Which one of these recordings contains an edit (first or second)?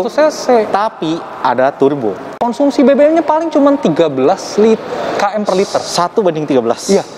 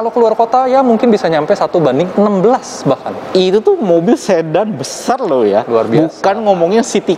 first